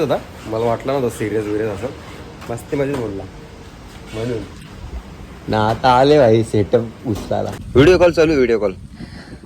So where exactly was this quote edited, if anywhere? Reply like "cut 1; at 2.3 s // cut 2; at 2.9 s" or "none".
cut 1; at 7.6 s